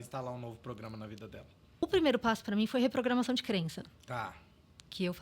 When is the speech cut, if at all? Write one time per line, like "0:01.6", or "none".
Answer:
0:01.8